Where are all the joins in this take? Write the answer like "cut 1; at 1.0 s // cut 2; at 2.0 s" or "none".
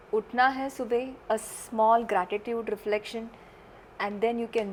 none